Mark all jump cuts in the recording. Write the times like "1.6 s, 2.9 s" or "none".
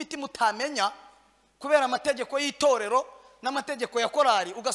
none

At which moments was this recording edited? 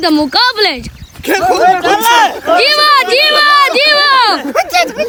none

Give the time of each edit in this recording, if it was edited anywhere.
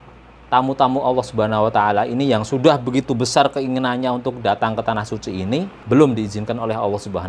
5.7 s

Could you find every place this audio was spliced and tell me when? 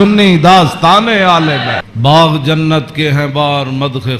1.9 s

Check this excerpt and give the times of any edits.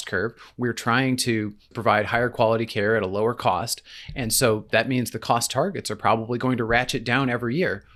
none

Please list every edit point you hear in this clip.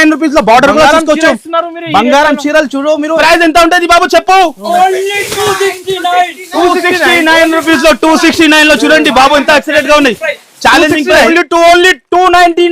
3.2 s, 11.3 s

